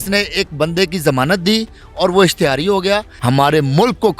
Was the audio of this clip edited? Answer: yes; 1 cut; at 3.2 s

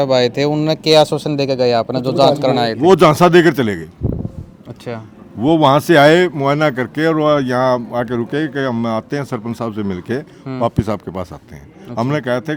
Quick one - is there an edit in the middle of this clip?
no; 0 cuts

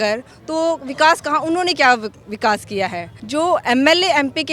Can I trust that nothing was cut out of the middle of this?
no; 1 cut; at 3.1 s

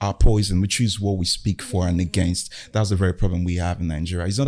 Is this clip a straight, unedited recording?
yes; 0 cuts

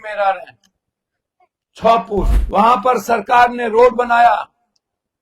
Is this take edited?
yes; 1 cut; at 2.4 s

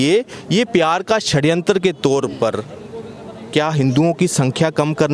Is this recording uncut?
yes; 0 cuts

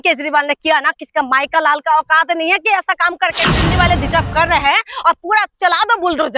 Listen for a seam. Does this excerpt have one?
yes; 1 cut; at 3.5 s

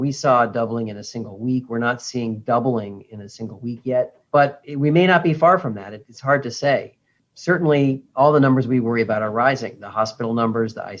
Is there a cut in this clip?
no; 0 cuts

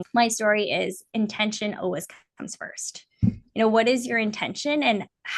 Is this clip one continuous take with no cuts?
yes; 0 cuts

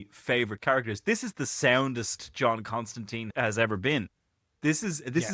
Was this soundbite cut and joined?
yes; 1 cut; at 3.3 s

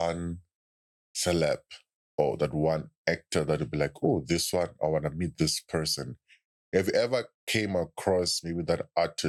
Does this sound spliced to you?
no; 0 cuts

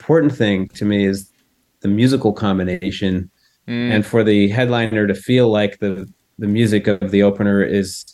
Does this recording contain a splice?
no; 0 cuts

